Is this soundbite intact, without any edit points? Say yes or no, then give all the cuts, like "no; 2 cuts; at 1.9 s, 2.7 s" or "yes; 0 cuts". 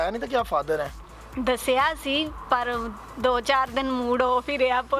yes; 0 cuts